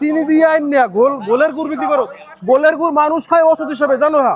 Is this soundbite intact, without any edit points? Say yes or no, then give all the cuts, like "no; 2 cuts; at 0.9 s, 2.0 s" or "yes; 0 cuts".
yes; 0 cuts